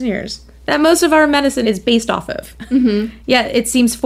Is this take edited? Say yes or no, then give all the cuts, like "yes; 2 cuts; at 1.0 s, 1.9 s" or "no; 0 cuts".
yes; 1 cut; at 1.6 s